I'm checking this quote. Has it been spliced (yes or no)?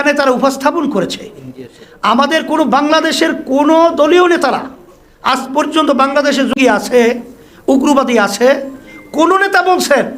yes